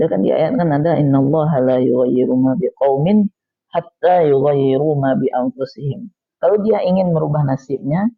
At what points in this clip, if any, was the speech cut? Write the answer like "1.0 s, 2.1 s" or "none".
none

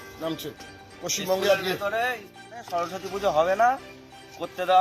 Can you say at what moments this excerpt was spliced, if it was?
2.6 s

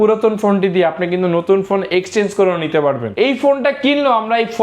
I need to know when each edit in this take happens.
3.1 s

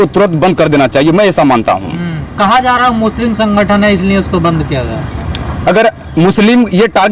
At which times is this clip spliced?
none

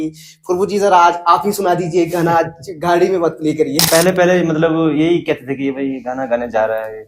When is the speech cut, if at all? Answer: 3.9 s

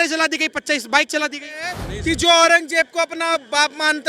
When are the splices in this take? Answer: 1.9 s

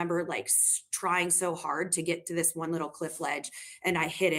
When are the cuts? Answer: none

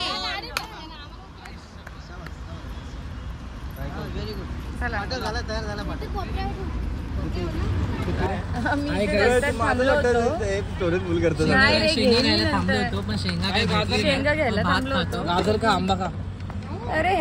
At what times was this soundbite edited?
8.3 s

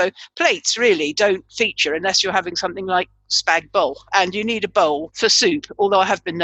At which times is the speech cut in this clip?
5.1 s

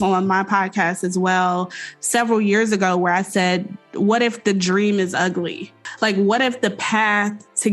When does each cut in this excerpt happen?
5.8 s

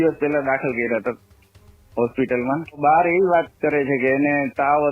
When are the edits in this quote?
2.8 s

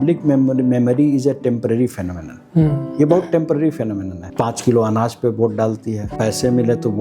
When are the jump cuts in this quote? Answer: 4.2 s, 6.0 s

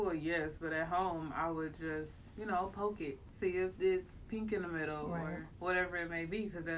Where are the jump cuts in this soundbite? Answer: 3.2 s, 5.5 s

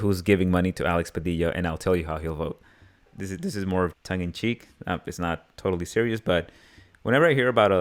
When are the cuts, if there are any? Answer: 3.1 s

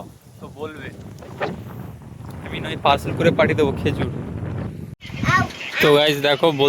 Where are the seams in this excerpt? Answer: 5.0 s

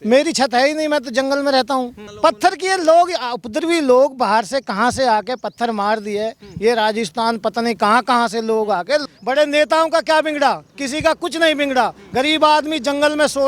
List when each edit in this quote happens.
2.0 s, 9.0 s

